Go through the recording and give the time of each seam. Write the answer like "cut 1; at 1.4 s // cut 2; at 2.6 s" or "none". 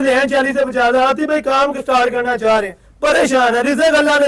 none